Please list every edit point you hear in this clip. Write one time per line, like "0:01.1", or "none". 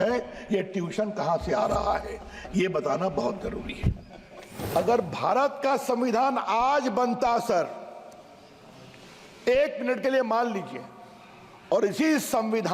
0:04.6